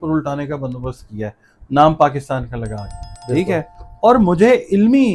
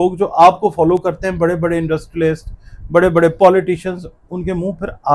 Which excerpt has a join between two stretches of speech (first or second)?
first